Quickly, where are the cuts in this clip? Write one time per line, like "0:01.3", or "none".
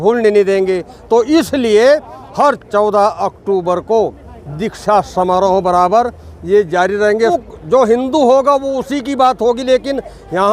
0:07.4